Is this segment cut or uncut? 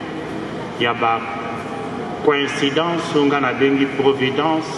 uncut